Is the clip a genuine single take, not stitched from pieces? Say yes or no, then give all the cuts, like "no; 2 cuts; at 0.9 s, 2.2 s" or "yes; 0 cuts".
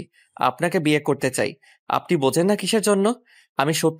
yes; 0 cuts